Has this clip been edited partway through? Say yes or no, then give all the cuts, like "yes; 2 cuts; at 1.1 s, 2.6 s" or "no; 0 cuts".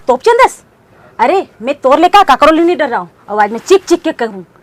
no; 0 cuts